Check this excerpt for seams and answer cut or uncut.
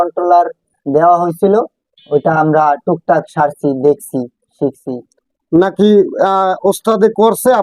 uncut